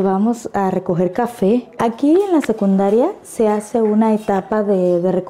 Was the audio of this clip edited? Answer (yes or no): no